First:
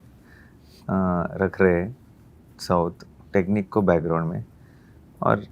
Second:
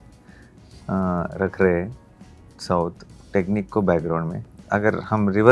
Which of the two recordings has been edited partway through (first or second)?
second